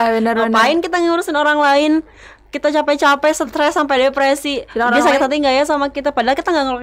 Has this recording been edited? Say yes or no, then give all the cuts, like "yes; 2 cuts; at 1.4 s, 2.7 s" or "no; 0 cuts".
no; 0 cuts